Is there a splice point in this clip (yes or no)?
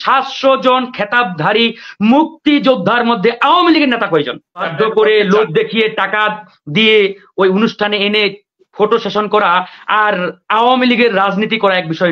yes